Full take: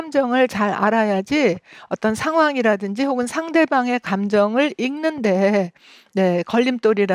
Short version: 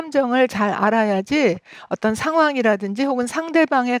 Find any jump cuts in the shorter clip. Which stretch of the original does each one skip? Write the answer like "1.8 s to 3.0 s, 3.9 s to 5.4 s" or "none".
none